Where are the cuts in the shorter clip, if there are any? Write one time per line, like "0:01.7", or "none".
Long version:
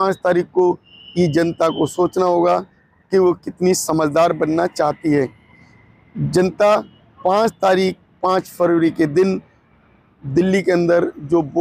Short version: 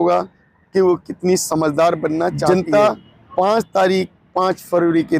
0:02.5